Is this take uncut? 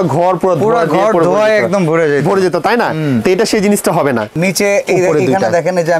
no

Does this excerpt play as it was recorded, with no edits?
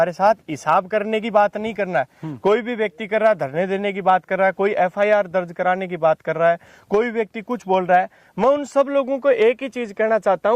yes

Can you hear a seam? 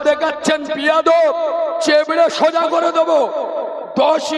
no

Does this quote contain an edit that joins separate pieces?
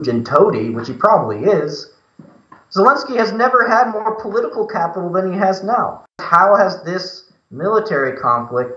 yes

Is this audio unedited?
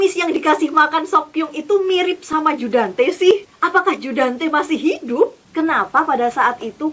no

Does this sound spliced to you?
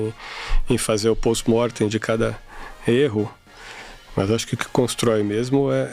no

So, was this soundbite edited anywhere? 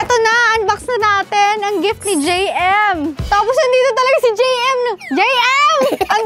yes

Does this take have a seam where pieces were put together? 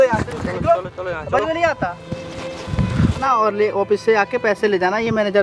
yes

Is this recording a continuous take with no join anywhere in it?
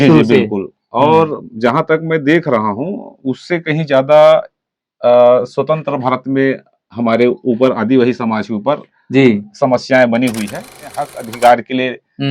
no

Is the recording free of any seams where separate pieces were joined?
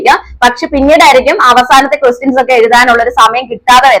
yes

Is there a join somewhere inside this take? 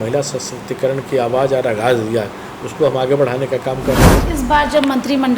yes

